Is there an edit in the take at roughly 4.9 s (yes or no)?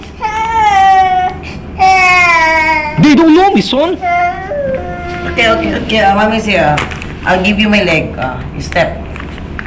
no